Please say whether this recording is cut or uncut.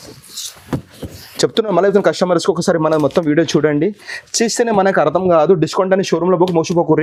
uncut